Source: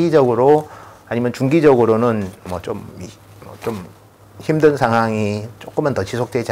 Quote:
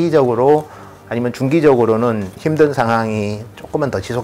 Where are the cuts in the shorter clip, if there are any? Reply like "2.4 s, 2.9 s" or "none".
2.3 s